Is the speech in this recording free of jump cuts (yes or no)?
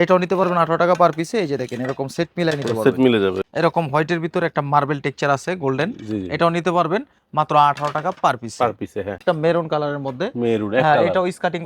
no